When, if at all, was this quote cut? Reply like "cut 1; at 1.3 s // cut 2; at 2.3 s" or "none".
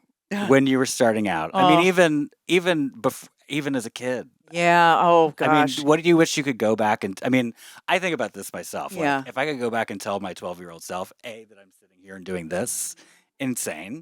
none